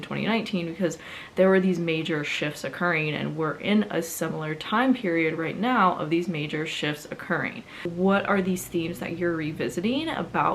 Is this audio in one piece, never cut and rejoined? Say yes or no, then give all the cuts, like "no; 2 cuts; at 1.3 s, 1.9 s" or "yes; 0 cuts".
no; 1 cut; at 7.9 s